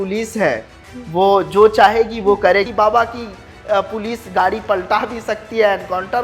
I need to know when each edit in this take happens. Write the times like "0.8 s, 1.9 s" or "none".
2.7 s